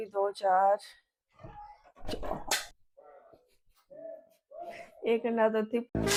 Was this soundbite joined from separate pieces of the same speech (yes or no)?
no